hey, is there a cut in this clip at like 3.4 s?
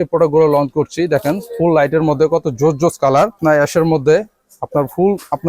yes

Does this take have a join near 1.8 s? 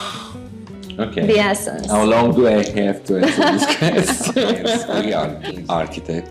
no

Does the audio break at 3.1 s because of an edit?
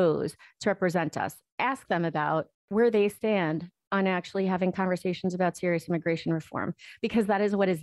no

